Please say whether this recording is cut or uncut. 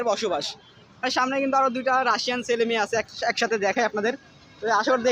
cut